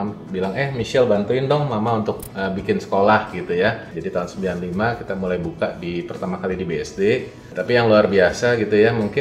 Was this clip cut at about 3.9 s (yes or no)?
yes